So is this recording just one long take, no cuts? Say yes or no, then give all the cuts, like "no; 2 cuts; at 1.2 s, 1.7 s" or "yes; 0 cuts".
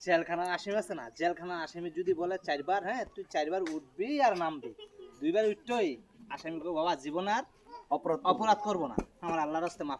yes; 0 cuts